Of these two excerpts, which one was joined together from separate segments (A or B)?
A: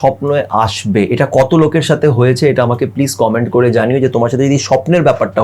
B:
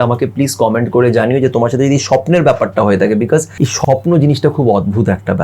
B